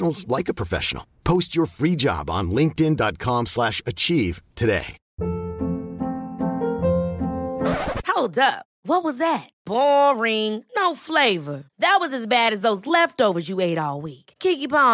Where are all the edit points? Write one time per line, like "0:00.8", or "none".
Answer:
0:05.0